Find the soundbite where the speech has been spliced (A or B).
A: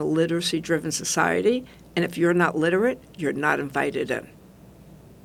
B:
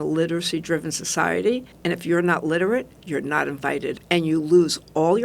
B